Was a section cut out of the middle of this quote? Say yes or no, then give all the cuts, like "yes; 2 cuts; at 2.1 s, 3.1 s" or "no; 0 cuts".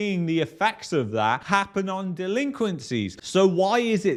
no; 0 cuts